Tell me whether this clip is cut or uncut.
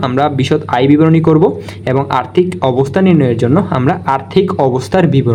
uncut